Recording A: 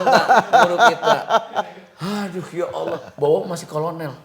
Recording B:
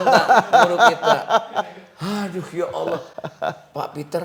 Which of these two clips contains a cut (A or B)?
A